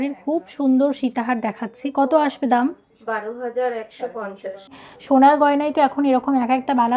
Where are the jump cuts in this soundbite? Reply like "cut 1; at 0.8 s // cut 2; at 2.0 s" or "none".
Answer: cut 1; at 4.8 s